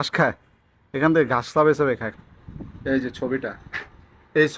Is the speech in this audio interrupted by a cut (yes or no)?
yes